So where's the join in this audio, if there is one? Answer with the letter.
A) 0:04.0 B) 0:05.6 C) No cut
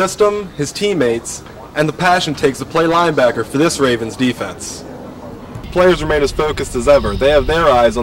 B